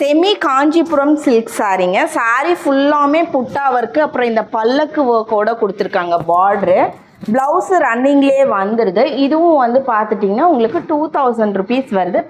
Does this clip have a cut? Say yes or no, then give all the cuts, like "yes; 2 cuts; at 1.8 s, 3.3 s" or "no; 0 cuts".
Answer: no; 0 cuts